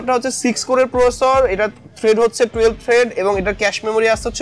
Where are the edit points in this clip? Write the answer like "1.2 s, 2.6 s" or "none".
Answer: none